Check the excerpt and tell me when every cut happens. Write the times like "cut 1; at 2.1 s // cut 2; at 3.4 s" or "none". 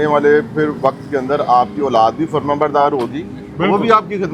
none